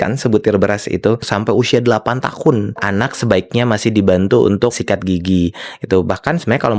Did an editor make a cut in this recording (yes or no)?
yes